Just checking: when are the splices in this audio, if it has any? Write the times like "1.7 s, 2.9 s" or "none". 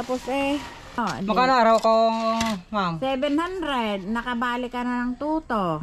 1.0 s